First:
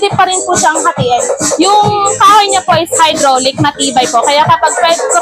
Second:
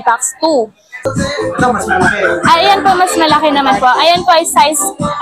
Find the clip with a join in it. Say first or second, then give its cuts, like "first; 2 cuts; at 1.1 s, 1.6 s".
second; 1 cut; at 1.0 s